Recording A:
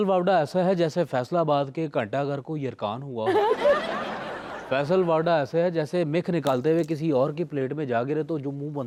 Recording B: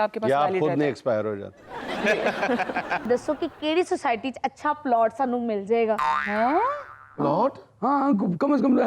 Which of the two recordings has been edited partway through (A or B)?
B